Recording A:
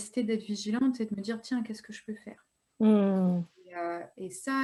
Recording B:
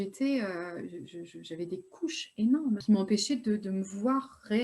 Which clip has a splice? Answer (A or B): B